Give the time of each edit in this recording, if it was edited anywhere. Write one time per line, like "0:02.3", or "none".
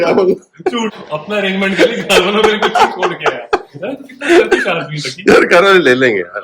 0:01.0
0:03.6